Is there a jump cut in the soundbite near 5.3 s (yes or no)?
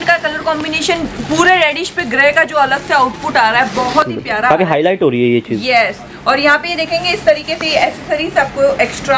no